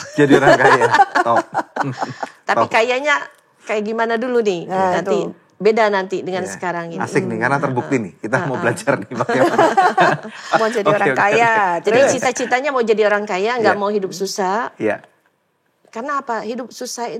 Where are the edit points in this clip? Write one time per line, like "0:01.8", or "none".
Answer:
none